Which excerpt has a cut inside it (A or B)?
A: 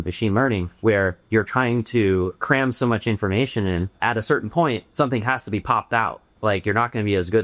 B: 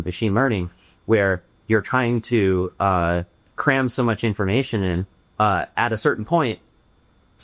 A